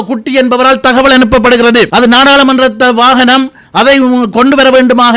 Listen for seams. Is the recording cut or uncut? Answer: cut